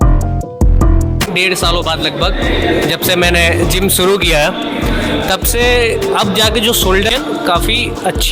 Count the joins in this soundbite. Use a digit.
2